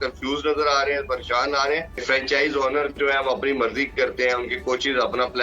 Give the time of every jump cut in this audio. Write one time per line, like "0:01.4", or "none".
0:02.0